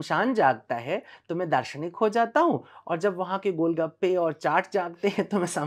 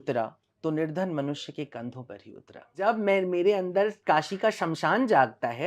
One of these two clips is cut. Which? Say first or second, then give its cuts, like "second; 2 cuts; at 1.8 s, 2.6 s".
second; 1 cut; at 2.8 s